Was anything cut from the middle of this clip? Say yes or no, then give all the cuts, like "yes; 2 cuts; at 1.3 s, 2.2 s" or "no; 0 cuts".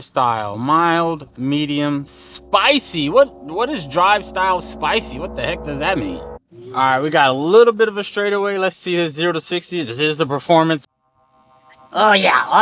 no; 0 cuts